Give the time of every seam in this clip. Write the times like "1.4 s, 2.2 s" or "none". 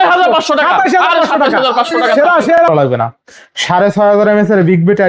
2.6 s